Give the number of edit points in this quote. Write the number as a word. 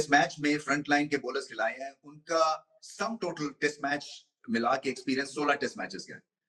zero